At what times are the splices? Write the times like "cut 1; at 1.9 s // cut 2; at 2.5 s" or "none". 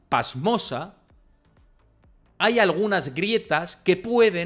none